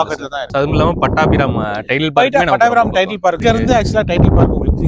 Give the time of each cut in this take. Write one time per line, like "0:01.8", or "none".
0:03.4